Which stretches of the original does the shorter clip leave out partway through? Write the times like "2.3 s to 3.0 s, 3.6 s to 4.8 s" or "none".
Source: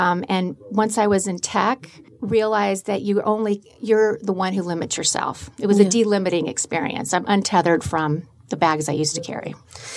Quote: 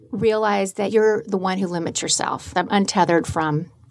3.0 s to 3.8 s, 5.4 s to 7.0 s